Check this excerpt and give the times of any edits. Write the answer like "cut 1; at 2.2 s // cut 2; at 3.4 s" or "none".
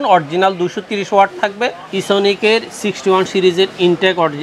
cut 1; at 1.9 s